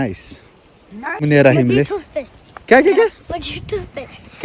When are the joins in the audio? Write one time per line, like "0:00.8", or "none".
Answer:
0:01.2

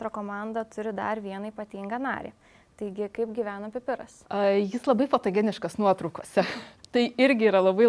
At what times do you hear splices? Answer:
0:04.1

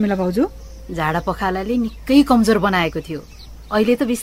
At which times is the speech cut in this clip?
none

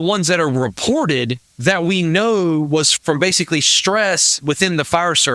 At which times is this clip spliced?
0:01.4
0:02.9

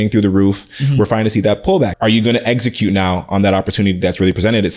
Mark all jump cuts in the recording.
0:01.9

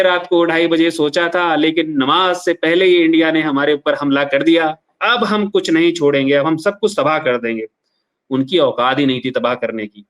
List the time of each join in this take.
0:05.0

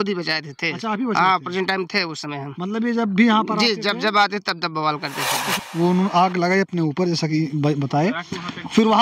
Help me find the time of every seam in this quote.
0:05.5

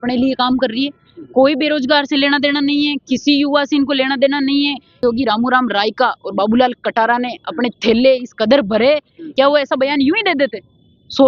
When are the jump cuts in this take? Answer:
0:05.0
0:09.2

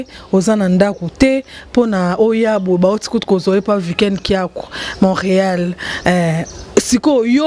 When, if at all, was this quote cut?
none

